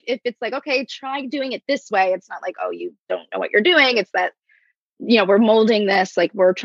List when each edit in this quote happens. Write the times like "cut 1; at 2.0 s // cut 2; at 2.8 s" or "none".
none